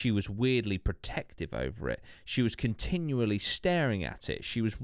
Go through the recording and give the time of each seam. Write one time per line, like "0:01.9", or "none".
none